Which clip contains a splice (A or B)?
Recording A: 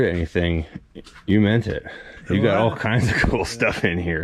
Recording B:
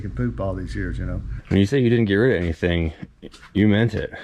B